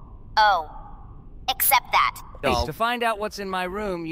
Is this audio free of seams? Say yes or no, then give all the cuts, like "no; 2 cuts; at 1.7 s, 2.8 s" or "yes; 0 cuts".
no; 1 cut; at 2.6 s